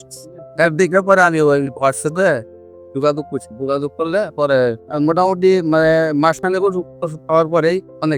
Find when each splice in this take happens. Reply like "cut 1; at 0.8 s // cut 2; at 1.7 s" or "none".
cut 1; at 4.8 s